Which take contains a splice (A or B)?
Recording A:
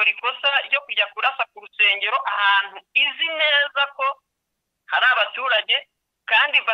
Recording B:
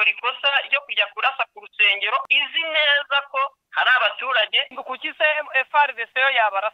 B